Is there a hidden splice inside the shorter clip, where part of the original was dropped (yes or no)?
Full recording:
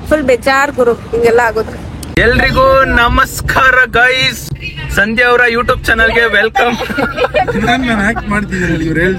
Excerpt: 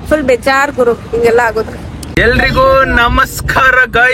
no